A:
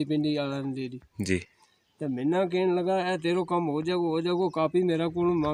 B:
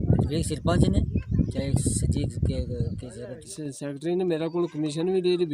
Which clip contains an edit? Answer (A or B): B